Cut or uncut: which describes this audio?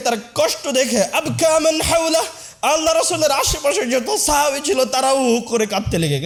uncut